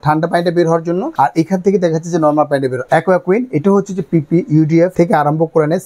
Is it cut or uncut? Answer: cut